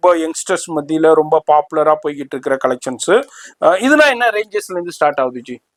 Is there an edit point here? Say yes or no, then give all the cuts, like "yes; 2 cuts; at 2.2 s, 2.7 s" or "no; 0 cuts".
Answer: no; 0 cuts